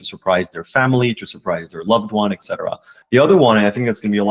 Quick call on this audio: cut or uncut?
cut